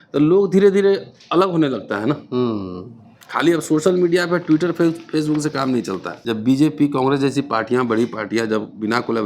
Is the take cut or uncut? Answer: cut